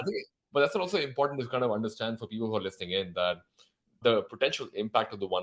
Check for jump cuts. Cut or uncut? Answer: uncut